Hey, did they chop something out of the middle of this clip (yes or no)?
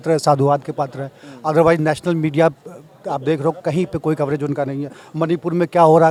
no